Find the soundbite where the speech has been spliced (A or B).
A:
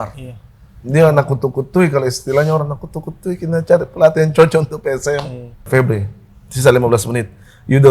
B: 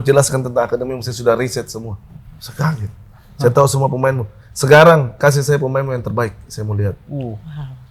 A